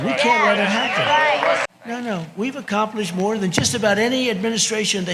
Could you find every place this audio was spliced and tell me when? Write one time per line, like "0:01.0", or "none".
0:01.6